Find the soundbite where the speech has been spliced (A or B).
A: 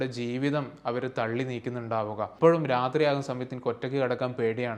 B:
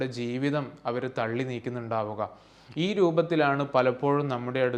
A